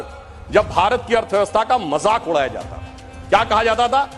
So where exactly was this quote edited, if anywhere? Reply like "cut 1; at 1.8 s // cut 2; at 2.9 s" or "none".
none